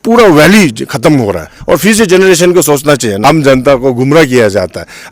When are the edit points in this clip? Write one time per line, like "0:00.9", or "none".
0:01.5
0:03.2